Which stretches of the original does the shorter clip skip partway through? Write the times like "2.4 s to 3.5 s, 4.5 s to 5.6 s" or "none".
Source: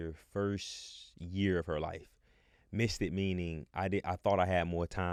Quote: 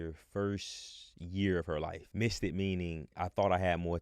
2.0 s to 2.6 s, 3.7 s to 4.0 s